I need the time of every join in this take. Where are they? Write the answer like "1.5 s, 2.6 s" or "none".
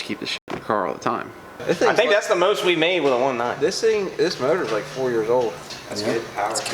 1.6 s, 5.7 s